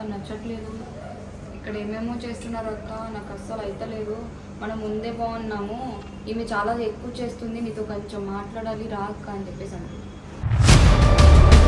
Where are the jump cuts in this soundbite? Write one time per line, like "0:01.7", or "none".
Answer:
none